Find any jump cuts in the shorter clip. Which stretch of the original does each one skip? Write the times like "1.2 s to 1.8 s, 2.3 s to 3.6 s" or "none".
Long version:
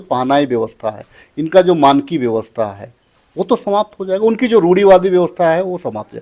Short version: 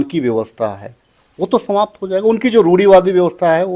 none